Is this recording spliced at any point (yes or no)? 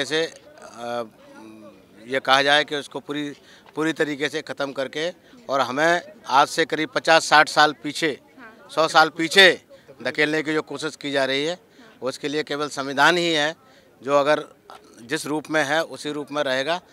no